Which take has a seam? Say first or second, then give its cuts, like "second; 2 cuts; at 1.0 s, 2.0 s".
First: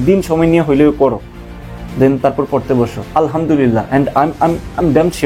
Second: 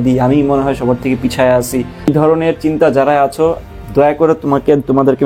second; 1 cut; at 2.1 s